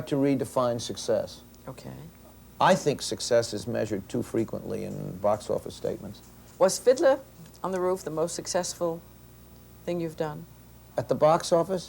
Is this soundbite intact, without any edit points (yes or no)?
no